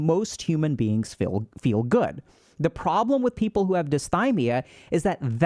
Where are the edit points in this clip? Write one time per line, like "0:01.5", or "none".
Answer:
none